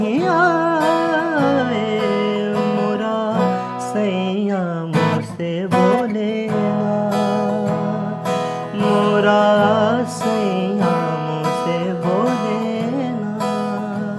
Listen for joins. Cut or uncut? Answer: uncut